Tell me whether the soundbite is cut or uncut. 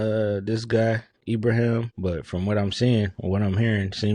cut